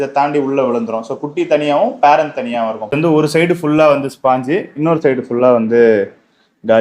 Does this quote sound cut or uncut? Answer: cut